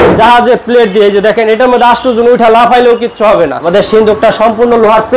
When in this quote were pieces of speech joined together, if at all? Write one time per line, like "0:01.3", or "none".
0:03.6